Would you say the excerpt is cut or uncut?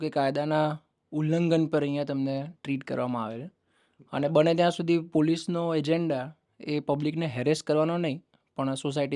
uncut